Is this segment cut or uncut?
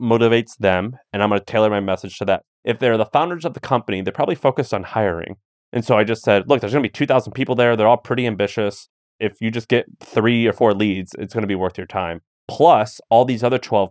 cut